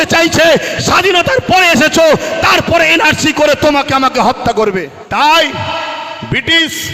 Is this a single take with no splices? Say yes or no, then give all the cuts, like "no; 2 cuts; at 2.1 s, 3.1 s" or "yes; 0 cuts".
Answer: no; 1 cut; at 5.0 s